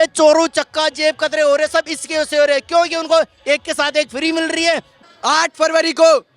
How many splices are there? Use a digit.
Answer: 1